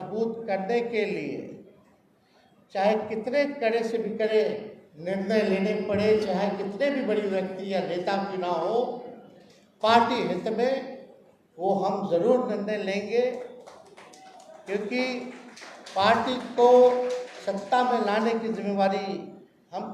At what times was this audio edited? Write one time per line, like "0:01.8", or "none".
none